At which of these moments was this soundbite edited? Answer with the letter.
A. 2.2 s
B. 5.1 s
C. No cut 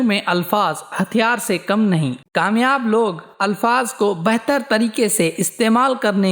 A